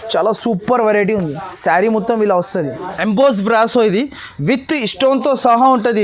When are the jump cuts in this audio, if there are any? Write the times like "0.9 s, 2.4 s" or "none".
2.8 s

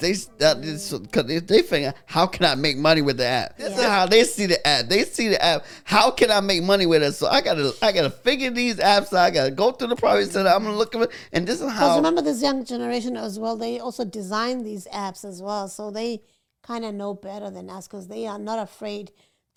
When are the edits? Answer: none

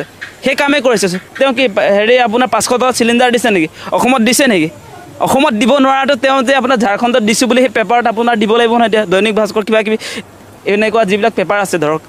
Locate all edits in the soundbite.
none

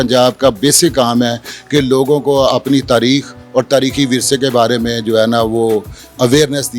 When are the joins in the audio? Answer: none

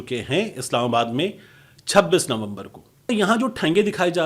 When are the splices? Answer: 3.1 s

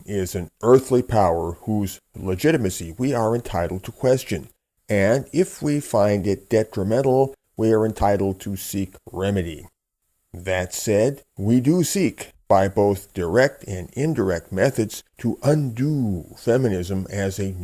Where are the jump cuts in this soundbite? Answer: none

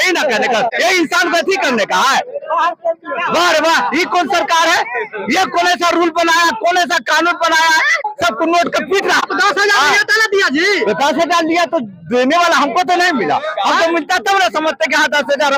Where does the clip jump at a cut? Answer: 0.7 s, 8.0 s, 9.2 s

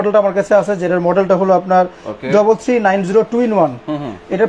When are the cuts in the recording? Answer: none

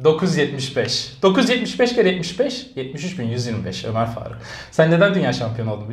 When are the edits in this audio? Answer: none

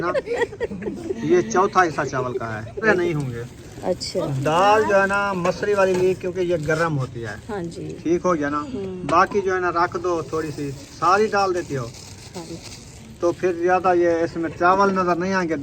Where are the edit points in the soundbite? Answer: 2.9 s, 12.4 s

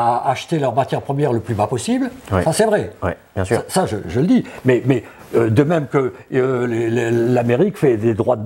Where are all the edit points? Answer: none

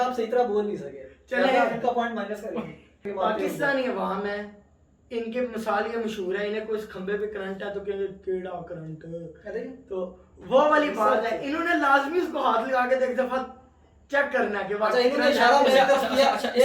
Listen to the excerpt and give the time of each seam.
3.1 s

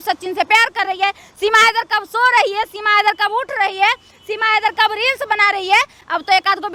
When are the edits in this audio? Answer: none

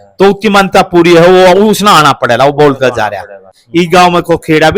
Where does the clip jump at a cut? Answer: 3.5 s

